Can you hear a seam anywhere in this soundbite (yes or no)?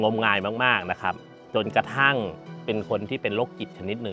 yes